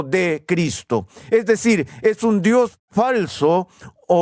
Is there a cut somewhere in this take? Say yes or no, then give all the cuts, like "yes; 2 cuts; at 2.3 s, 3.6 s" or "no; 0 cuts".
no; 0 cuts